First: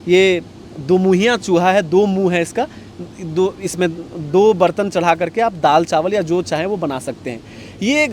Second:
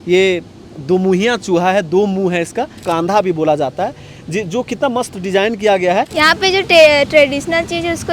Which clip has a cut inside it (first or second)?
second